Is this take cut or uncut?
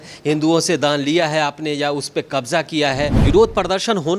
cut